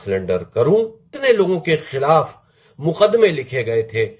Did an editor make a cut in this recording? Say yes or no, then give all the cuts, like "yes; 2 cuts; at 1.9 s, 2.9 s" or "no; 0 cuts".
yes; 1 cut; at 1.0 s